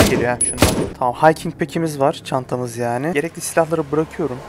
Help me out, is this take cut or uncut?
cut